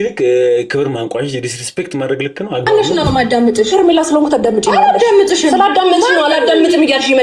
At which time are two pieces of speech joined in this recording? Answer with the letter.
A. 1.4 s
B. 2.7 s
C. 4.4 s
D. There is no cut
B